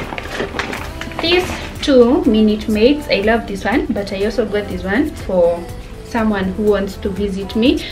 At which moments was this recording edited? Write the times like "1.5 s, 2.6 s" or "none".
none